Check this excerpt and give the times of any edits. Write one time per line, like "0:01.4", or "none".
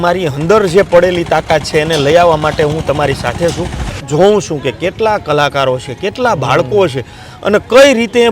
0:04.0